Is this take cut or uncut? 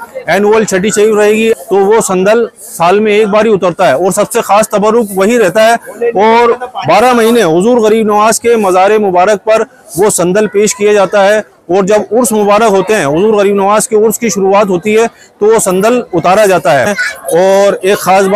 cut